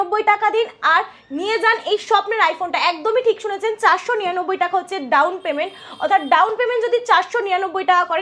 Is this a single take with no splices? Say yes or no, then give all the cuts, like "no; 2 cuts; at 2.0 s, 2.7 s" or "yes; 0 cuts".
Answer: yes; 0 cuts